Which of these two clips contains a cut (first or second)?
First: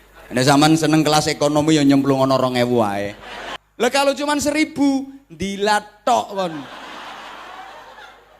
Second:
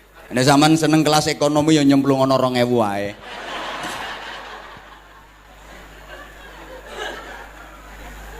first